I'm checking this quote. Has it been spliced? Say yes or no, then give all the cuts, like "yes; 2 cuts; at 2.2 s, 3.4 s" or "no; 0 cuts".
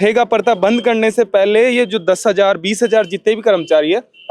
no; 0 cuts